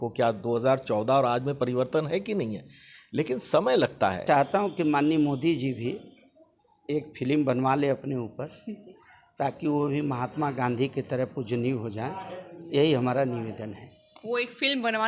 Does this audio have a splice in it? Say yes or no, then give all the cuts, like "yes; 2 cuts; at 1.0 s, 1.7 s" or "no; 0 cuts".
yes; 1 cut; at 4.2 s